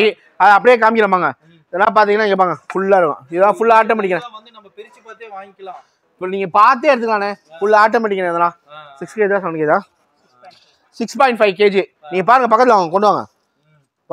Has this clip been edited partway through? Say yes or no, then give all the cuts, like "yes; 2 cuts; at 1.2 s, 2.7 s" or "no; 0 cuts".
no; 0 cuts